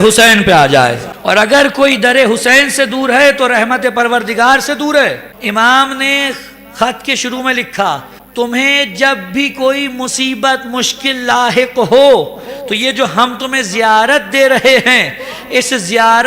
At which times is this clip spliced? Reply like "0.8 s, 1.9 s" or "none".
5.3 s